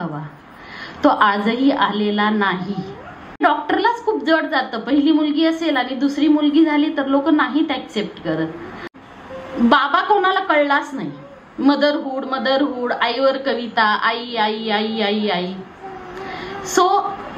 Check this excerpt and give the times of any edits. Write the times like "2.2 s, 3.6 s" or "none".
3.4 s, 8.9 s